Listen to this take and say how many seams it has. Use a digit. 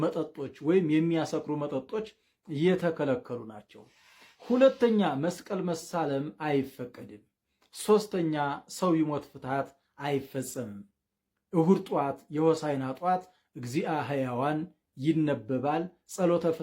0